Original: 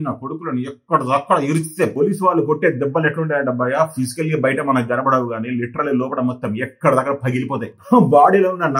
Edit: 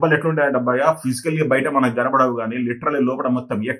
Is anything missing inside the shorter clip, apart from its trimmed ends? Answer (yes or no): no